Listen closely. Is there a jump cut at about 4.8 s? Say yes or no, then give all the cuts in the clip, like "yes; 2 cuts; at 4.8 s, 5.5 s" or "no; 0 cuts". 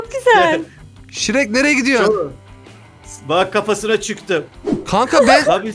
yes; 1 cut; at 4.8 s